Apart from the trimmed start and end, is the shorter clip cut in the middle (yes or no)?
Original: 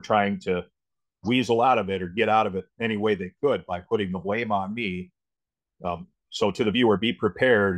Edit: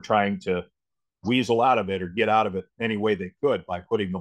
no